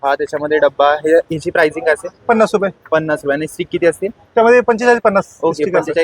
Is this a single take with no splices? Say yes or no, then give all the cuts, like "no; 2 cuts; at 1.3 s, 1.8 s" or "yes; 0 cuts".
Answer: yes; 0 cuts